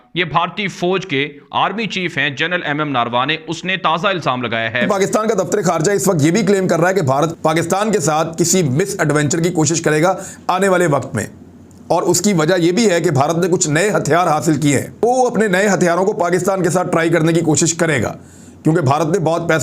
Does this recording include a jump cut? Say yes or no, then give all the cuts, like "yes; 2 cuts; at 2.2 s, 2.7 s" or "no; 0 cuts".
yes; 3 cuts; at 4.8 s, 7.3 s, 15.0 s